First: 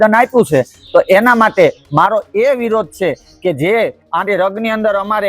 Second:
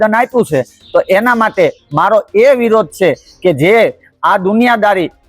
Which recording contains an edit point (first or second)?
first